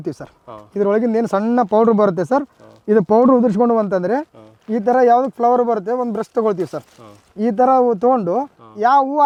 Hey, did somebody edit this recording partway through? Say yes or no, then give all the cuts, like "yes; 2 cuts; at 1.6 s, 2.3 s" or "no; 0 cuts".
no; 0 cuts